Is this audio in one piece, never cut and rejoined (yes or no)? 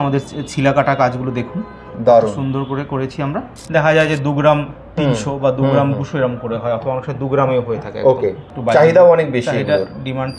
no